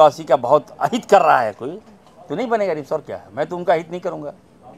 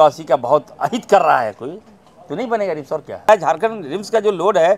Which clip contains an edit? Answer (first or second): second